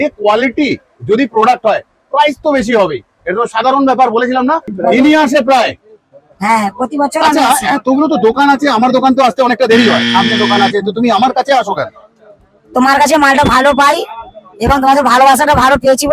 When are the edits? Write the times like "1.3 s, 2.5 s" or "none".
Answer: 4.7 s